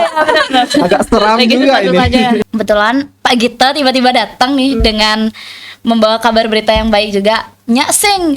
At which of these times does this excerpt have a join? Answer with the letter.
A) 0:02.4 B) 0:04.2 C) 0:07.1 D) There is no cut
A